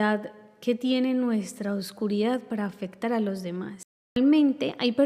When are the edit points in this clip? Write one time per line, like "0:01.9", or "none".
0:04.2